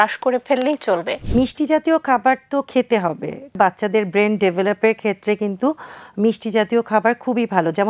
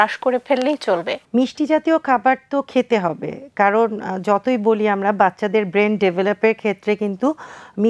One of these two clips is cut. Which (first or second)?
first